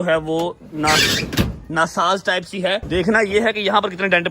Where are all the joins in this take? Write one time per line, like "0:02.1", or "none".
0:02.8